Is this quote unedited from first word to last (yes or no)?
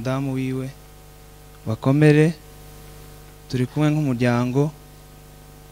yes